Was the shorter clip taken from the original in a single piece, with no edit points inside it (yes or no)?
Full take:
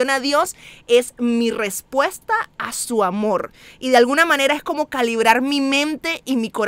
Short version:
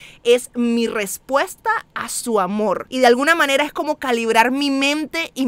no